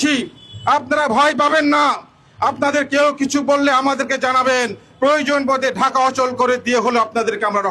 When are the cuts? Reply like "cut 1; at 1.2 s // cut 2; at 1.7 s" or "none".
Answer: none